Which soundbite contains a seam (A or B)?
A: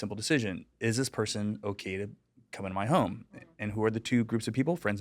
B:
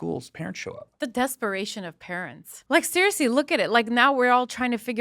B